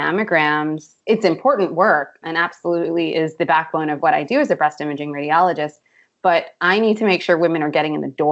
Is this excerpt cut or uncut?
uncut